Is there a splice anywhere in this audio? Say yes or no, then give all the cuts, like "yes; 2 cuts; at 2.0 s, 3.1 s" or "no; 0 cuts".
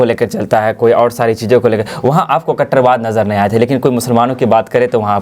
no; 0 cuts